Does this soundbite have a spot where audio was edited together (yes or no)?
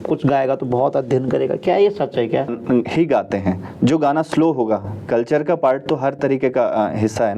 yes